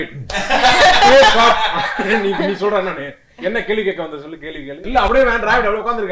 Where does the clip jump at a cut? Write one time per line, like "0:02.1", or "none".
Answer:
0:04.9